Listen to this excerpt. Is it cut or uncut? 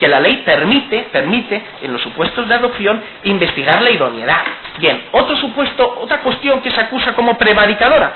uncut